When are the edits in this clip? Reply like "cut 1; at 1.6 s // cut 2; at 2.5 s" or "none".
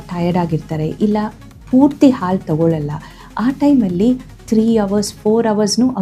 none

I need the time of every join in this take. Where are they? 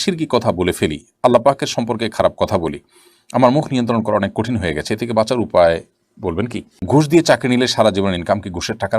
cut 1; at 6.9 s

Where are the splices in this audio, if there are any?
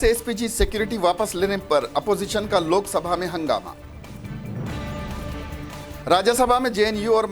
cut 1; at 4.7 s // cut 2; at 5.9 s

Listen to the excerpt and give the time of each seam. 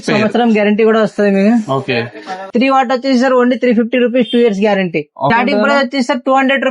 cut 1; at 2.4 s // cut 2; at 5.3 s

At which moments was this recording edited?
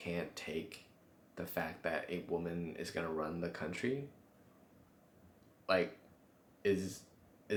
none

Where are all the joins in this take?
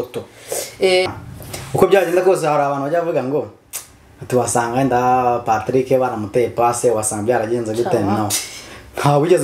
cut 1; at 1.1 s

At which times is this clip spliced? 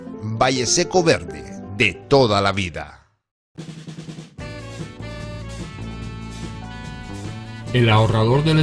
cut 1; at 3.6 s

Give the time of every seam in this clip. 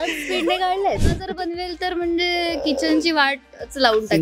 cut 1; at 1.0 s

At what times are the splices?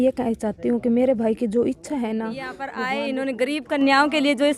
cut 1; at 2.6 s

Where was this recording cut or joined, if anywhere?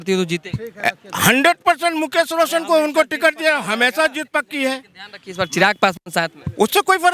none

